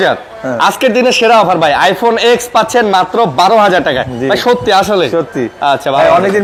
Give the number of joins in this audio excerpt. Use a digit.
0